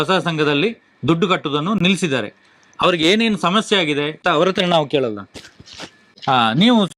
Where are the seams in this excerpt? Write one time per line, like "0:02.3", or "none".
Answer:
0:01.7